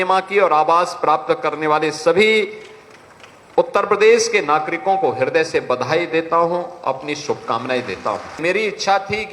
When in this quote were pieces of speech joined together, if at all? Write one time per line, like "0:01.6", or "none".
0:08.4